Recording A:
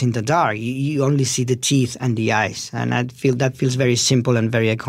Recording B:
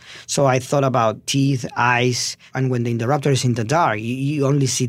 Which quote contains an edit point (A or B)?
B